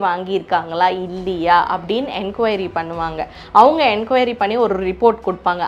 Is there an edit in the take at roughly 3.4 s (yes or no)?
yes